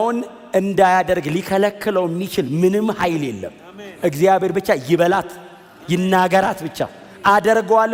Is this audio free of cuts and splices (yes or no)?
yes